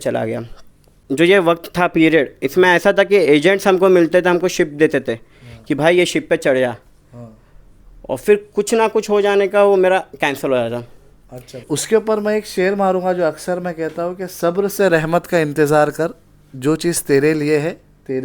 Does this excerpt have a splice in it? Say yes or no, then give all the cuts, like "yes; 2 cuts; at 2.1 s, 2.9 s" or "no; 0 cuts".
yes; 2 cuts; at 1.0 s, 11.6 s